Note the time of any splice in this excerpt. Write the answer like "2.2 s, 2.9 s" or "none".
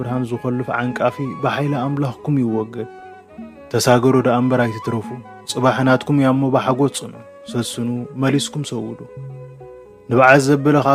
none